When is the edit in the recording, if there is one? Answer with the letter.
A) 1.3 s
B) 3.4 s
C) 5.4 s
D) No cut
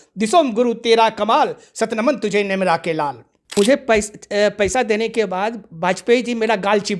B